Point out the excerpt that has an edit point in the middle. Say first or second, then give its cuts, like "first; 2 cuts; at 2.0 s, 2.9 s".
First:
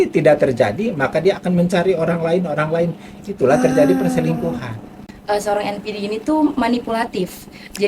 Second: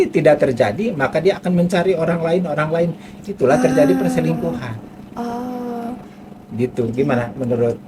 first; 1 cut; at 5.1 s